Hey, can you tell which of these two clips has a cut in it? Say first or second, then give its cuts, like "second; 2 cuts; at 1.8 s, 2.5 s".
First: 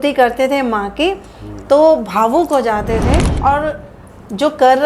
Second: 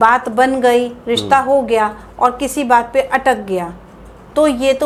first; 1 cut; at 3.3 s